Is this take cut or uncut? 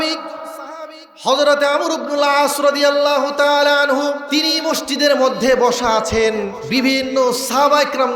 cut